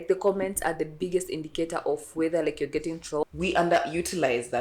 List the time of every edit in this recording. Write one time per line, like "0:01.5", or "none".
0:03.2